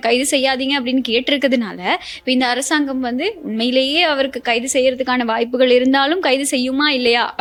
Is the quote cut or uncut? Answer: uncut